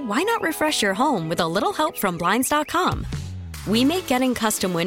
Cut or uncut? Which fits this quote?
uncut